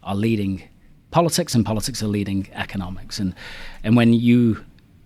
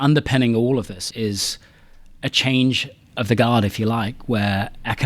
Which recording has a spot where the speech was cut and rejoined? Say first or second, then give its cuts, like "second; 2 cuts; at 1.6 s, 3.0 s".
second; 1 cut; at 1.0 s